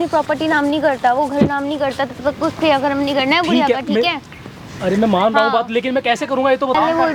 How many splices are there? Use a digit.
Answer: 0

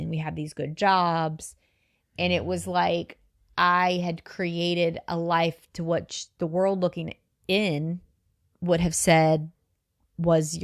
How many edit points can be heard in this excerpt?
0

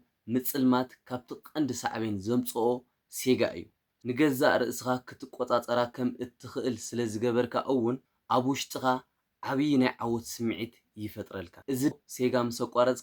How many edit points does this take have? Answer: 2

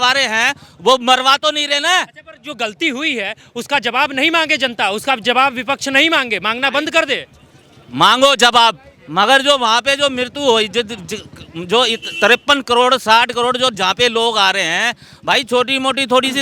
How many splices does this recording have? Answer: 0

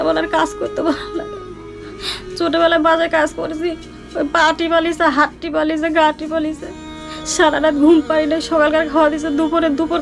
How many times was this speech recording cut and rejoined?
0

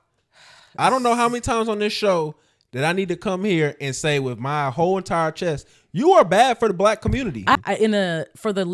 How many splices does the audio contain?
1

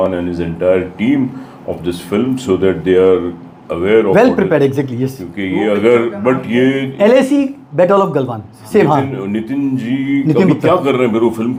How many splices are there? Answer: 0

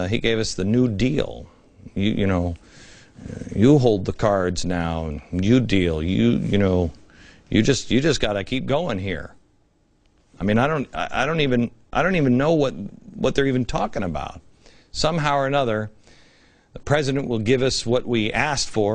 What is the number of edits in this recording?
1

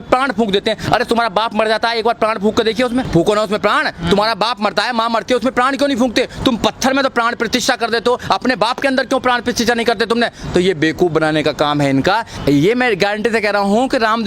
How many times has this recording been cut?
2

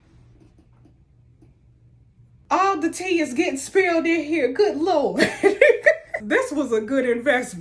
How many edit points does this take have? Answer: 2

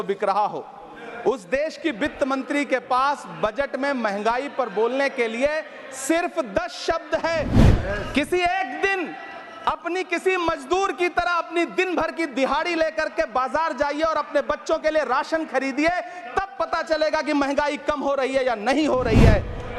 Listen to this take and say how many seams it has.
1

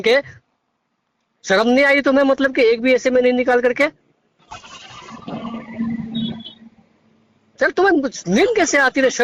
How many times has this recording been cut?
0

